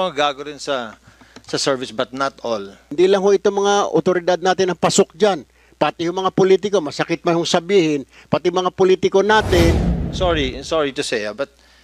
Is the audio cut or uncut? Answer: cut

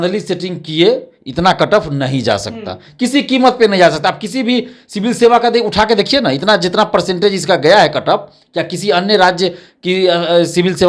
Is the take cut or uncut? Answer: uncut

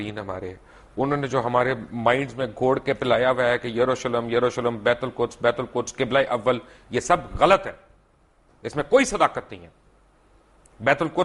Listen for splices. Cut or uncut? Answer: uncut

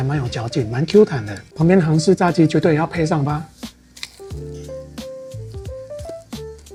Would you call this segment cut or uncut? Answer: uncut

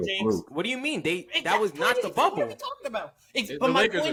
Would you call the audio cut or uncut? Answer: uncut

